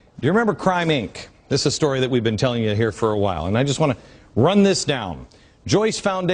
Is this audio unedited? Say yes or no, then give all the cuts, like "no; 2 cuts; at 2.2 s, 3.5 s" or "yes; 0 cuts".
yes; 0 cuts